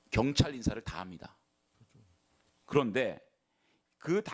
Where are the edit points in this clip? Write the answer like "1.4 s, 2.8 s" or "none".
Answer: none